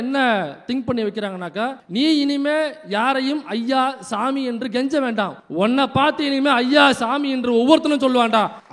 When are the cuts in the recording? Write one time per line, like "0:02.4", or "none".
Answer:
none